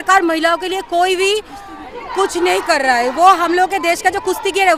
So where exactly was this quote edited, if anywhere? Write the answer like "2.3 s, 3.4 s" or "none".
none